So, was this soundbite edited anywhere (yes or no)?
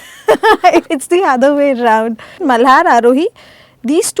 yes